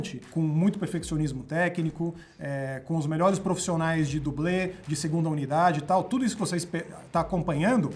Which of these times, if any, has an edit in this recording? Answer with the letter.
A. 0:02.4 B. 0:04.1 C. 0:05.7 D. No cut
D